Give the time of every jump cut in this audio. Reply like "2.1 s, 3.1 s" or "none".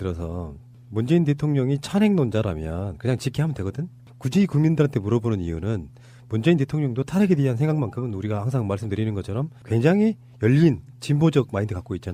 8.0 s